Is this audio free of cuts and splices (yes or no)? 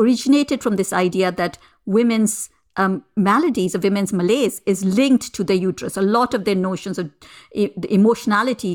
yes